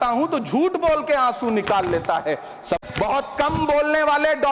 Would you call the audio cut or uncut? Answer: cut